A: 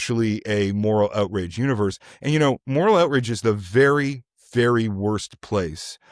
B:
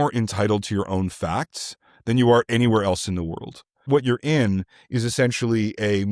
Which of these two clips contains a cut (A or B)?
B